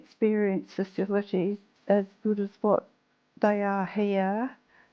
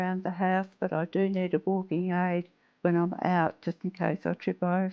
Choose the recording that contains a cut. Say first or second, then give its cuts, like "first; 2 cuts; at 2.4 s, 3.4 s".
first; 1 cut; at 1.7 s